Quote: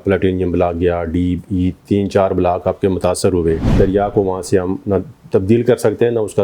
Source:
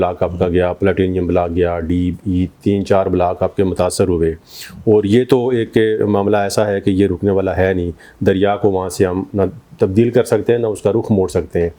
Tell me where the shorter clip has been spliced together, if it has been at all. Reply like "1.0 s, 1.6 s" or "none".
3.6 s